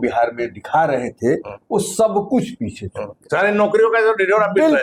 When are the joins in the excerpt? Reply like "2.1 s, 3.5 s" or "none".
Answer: none